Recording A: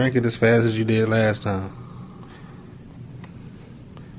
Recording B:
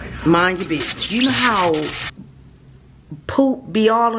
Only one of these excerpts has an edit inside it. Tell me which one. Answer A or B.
B